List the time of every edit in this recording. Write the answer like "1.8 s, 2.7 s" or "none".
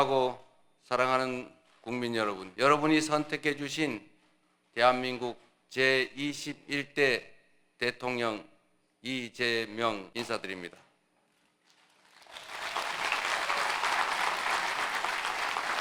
2.5 s, 10.1 s